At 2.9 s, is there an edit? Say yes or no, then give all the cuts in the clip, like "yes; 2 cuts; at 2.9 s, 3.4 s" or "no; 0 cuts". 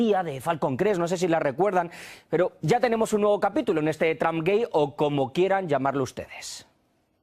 yes; 1 cut; at 2.9 s